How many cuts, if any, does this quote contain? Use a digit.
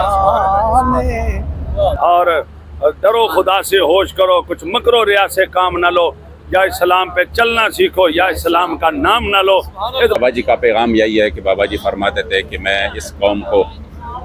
2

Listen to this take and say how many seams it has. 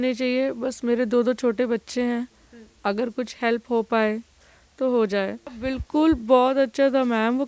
1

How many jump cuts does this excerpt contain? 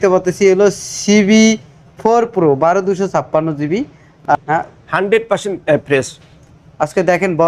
1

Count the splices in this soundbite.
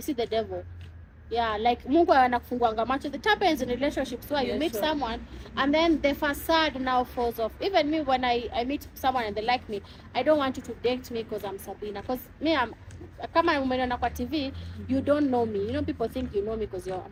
0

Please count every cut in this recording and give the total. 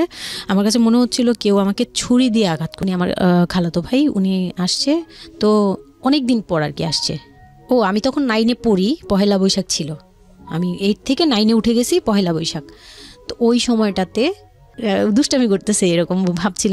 2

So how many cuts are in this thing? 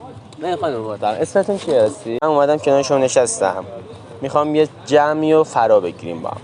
1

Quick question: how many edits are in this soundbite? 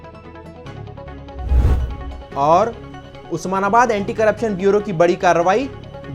1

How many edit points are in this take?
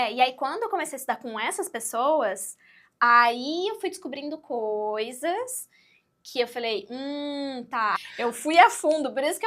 1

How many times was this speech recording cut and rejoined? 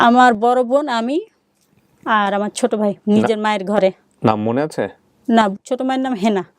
1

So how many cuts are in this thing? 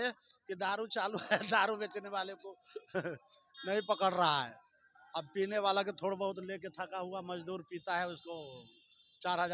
0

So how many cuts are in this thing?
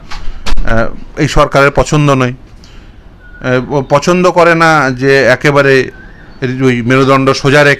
0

